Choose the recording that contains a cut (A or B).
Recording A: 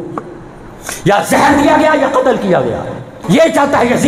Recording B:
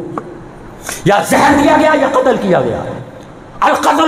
A